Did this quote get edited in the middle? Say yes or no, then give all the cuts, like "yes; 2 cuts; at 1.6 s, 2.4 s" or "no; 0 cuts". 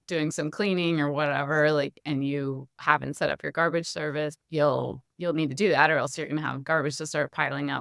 yes; 1 cut; at 4.4 s